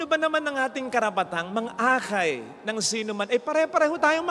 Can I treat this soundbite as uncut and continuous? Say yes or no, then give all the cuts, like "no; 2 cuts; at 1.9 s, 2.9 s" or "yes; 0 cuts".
yes; 0 cuts